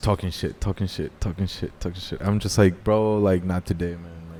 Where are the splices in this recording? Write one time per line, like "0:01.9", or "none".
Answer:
none